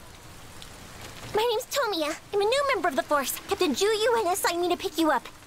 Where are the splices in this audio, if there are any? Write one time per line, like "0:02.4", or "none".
0:02.9